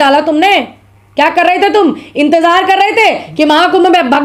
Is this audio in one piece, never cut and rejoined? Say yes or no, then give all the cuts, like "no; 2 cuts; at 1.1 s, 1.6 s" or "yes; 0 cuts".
yes; 0 cuts